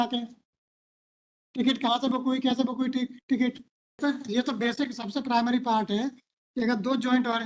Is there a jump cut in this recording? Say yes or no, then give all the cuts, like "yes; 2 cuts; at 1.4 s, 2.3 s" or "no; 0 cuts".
yes; 1 cut; at 4.0 s